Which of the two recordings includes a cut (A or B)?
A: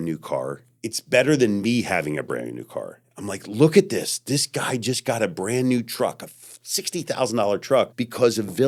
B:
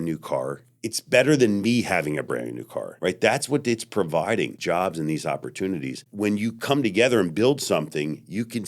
B